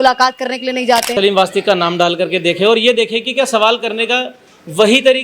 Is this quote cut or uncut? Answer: cut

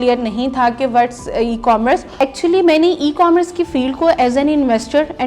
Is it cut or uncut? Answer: cut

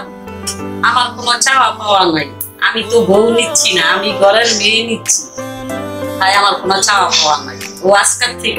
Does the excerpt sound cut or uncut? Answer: uncut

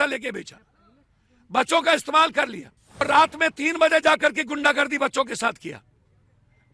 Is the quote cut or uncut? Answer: cut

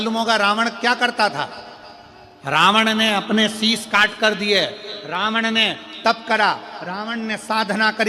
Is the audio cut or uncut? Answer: uncut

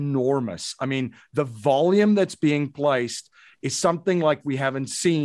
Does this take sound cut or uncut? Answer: uncut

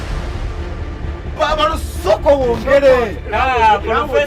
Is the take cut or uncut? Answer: uncut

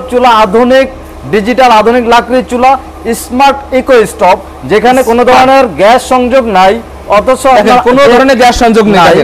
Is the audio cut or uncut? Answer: uncut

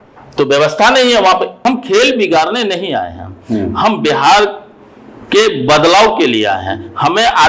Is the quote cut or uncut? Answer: cut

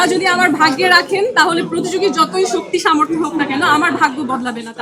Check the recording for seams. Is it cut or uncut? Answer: uncut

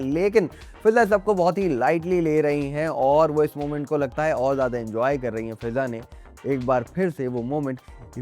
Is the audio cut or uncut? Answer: uncut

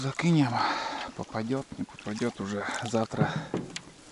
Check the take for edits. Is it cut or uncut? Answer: uncut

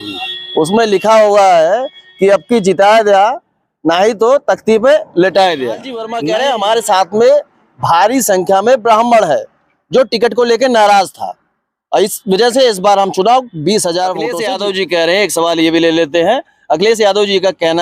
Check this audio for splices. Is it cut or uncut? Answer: cut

